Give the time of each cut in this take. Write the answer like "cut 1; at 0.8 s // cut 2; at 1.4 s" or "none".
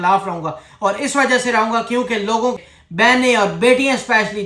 cut 1; at 2.6 s